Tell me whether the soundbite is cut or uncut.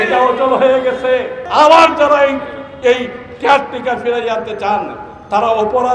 cut